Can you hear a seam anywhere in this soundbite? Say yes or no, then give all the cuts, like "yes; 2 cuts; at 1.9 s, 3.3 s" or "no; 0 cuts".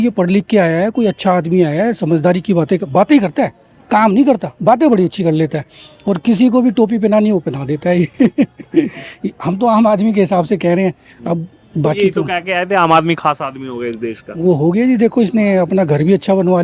no; 0 cuts